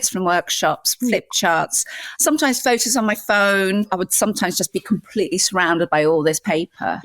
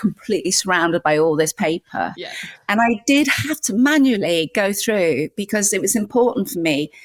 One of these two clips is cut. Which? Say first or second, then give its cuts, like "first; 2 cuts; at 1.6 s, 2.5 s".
first; 2 cuts; at 2.1 s, 3.9 s